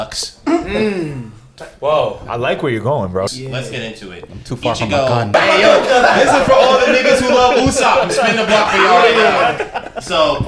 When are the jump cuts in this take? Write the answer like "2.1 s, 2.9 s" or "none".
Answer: 3.3 s, 5.3 s, 9.6 s